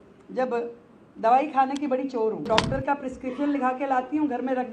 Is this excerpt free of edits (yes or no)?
no